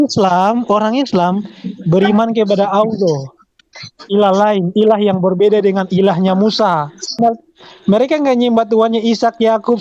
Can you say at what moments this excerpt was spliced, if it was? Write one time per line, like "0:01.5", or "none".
0:07.2